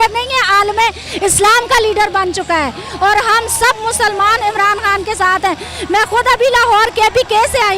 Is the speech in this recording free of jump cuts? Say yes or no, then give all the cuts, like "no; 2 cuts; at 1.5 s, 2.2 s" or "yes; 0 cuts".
yes; 0 cuts